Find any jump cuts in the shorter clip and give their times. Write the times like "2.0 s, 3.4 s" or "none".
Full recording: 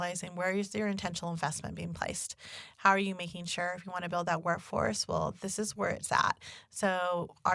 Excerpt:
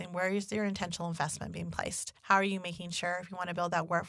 2.1 s

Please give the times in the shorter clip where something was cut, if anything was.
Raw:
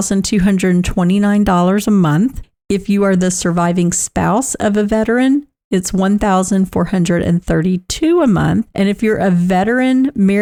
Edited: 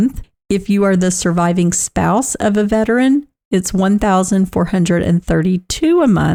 none

